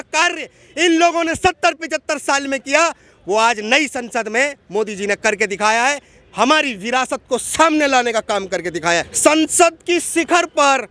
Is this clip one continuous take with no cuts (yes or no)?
no